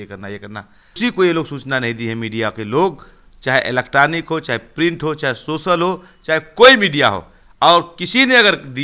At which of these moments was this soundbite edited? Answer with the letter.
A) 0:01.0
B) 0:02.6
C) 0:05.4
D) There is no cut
A